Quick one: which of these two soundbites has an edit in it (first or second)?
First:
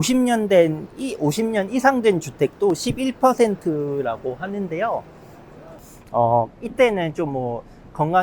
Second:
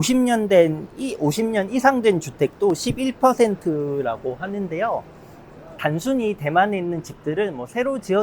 first